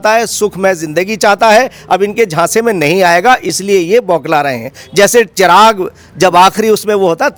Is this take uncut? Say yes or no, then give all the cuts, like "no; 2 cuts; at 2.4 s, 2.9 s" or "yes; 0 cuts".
yes; 0 cuts